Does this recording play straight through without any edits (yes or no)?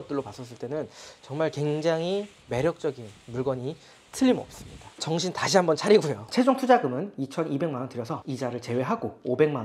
no